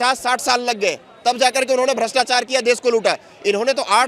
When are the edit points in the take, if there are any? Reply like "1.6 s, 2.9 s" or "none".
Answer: none